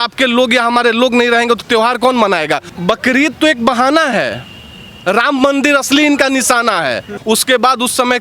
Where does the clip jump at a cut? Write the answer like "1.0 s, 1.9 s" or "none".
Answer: 2.7 s, 7.1 s